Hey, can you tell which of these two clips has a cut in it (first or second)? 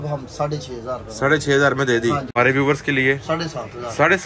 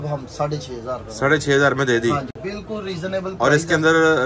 first